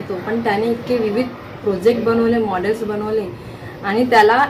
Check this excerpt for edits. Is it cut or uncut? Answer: uncut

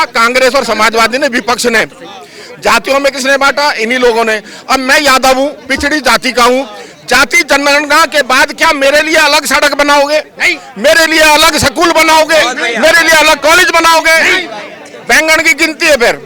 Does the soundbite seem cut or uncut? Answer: uncut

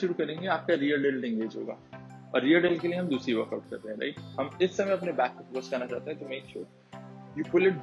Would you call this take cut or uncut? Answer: uncut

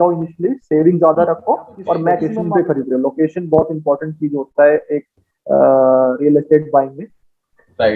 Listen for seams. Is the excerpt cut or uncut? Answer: cut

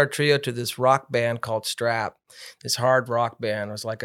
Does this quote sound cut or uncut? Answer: uncut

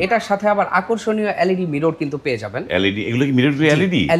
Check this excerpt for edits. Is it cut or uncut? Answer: uncut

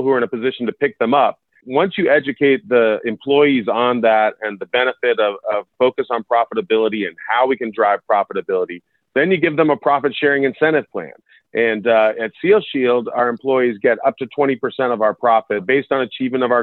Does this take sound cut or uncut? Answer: cut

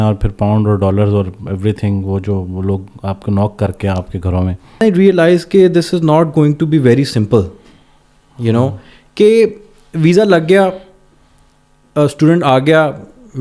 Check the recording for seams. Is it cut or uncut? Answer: cut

